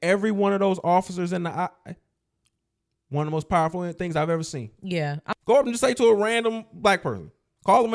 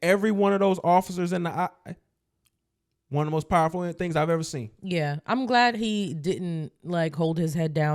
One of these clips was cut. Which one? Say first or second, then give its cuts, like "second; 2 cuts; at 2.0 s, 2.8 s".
first; 1 cut; at 5.2 s